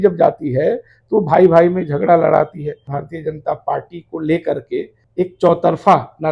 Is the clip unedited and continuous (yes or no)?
no